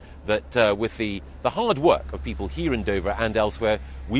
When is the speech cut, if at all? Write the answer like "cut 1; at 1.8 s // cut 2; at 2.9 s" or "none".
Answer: none